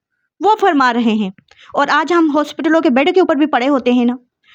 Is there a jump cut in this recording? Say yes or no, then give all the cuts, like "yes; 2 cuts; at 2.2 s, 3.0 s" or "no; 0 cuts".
no; 0 cuts